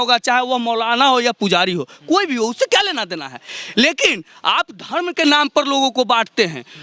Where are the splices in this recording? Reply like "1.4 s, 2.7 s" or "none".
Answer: none